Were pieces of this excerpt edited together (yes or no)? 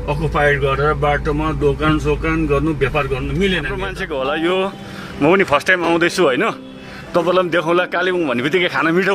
yes